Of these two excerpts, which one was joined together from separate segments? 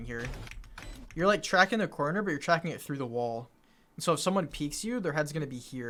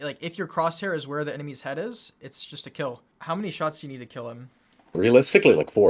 second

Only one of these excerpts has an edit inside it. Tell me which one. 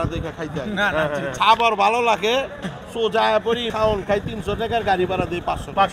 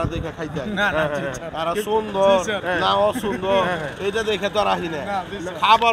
first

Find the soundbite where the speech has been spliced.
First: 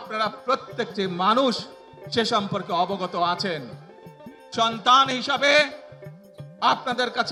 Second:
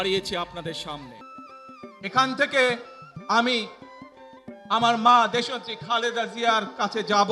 second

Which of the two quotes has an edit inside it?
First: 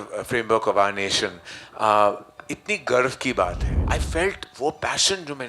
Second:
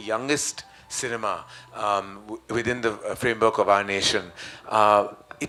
first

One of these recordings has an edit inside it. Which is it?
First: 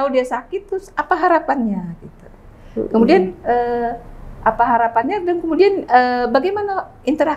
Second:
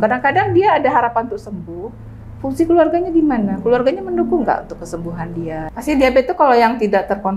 second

